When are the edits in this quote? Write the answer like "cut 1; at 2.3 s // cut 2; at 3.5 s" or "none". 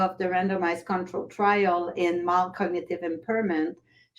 none

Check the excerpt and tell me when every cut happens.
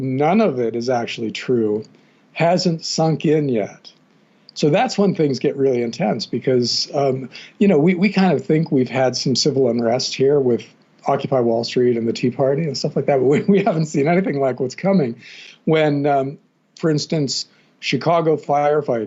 none

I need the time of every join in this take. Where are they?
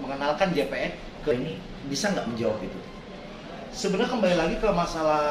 cut 1; at 1.3 s

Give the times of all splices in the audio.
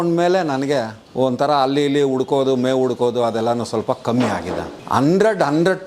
cut 1; at 1.0 s // cut 2; at 4.7 s

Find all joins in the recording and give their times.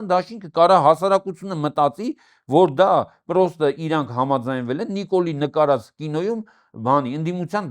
none

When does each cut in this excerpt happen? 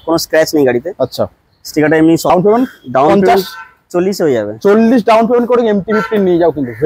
cut 1; at 2.3 s

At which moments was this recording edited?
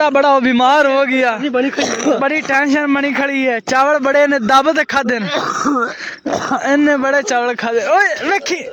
none

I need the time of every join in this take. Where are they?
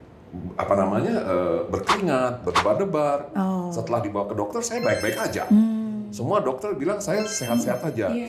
none

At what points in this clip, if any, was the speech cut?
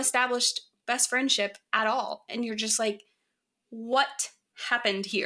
none

